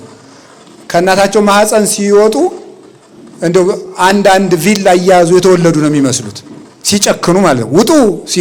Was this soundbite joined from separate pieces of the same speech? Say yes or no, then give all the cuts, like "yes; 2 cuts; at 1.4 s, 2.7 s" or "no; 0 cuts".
no; 0 cuts